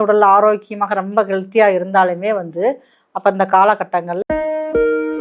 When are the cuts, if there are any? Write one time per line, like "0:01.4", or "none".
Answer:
0:04.1